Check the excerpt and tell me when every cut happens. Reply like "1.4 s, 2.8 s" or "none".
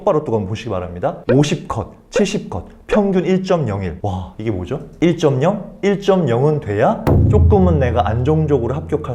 none